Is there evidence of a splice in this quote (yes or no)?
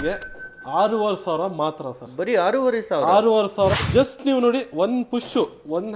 yes